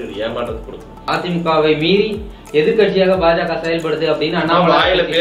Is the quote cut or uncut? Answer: cut